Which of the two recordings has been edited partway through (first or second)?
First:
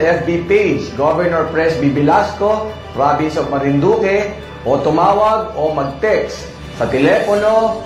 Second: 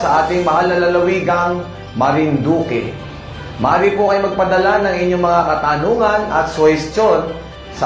second